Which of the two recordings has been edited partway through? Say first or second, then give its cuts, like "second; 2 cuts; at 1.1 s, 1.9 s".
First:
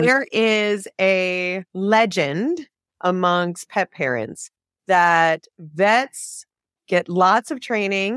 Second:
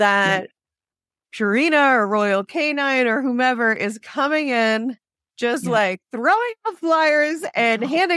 first; 1 cut; at 1.6 s